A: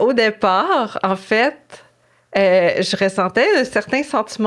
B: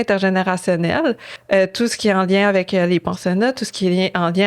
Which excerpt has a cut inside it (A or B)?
B